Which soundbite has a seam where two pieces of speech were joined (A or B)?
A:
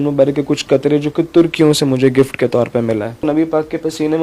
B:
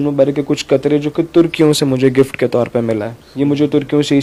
A